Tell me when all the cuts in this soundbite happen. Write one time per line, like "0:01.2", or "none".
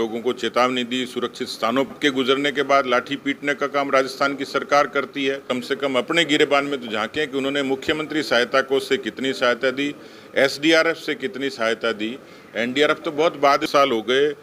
0:01.9
0:05.4
0:13.6